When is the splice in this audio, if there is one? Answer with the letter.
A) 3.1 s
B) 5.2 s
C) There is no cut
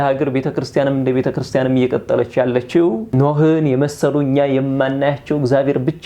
A